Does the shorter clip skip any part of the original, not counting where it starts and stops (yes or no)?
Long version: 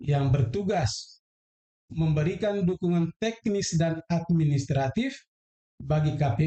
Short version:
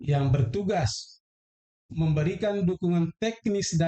no